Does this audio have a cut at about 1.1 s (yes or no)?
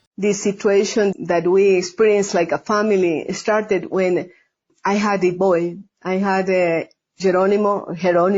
yes